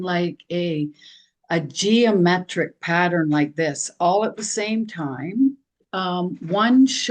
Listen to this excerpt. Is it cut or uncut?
cut